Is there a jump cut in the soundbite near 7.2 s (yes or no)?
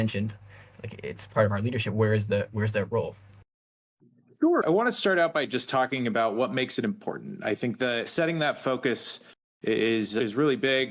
no